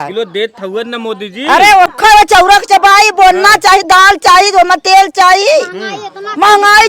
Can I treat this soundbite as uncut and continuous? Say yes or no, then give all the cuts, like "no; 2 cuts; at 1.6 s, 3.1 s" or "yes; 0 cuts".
no; 1 cut; at 1.9 s